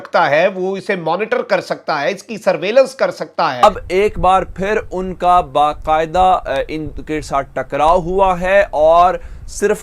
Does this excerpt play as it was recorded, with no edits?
no; 1 cut; at 3.6 s

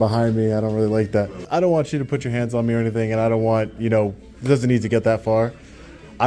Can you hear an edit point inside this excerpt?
yes; 1 cut; at 1.4 s

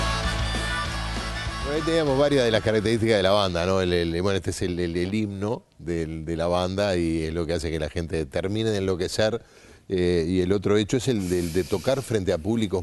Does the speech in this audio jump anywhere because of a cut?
yes; 1 cut; at 6.2 s

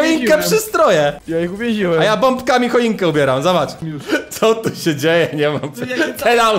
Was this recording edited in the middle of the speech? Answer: yes; 2 cuts; at 1.2 s, 3.8 s

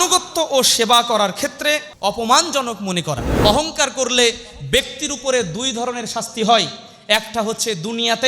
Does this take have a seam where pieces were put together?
yes; 2 cuts; at 1.9 s, 3.2 s

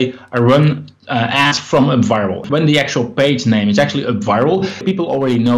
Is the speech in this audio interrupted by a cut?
yes; 2 cuts; at 2.4 s, 4.8 s

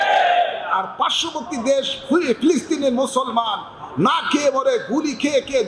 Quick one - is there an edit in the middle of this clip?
no; 0 cuts

